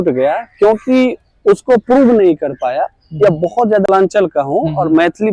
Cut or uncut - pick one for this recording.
cut